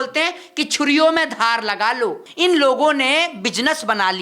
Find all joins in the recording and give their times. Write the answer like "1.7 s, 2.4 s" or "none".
2.2 s